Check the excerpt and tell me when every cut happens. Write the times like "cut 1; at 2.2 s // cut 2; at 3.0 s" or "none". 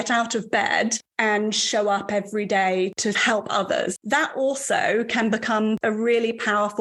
cut 1; at 3.0 s // cut 2; at 4.0 s // cut 3; at 5.8 s